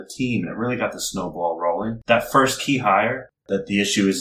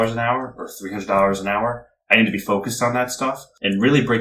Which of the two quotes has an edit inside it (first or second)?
first